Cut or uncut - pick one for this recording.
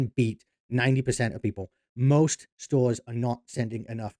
uncut